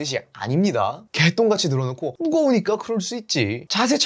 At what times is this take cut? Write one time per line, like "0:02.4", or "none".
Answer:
0:02.1